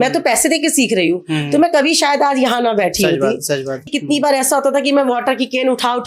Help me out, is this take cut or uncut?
cut